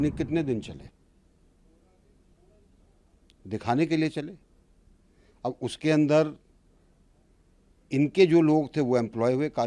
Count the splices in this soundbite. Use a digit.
0